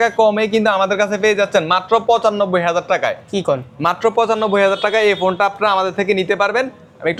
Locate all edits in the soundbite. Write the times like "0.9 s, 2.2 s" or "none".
none